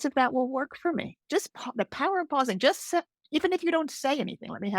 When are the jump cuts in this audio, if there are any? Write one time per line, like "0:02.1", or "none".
0:01.1